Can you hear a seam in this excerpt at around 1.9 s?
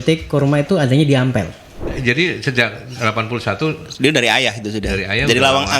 yes; 1 cut; at 1.9 s

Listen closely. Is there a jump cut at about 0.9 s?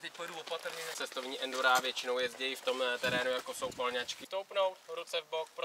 yes; 2 cuts; at 0.9 s, 4.2 s

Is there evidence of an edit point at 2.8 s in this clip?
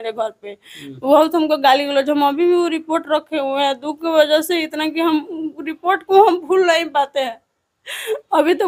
no; 0 cuts

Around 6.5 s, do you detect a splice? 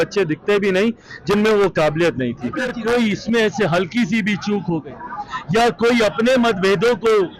no; 1 cut; at 2.7 s

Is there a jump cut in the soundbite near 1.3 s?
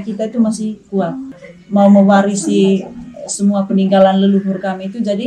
yes; 1 cut; at 1.3 s

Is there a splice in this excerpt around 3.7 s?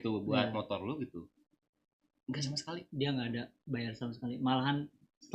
no; 0 cuts

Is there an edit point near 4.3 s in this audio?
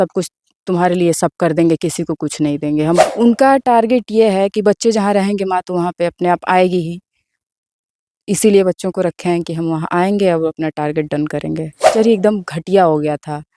no; 2 cuts; at 3.0 s, 11.9 s

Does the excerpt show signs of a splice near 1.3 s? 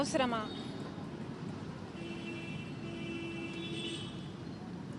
no; 0 cuts

